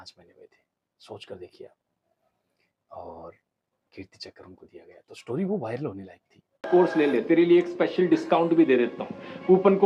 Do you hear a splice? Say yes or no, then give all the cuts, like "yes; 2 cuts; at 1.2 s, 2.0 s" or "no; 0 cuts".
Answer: yes; 1 cut; at 6.6 s